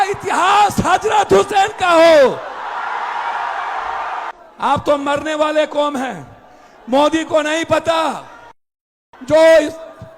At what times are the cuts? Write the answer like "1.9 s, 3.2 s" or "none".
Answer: 4.3 s